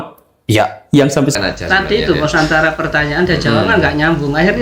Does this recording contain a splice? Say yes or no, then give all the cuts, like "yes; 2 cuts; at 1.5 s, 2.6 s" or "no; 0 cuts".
yes; 1 cut; at 1.4 s